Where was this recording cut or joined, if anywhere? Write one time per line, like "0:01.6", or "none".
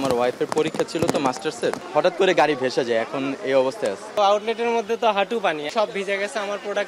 0:01.8
0:04.1
0:05.7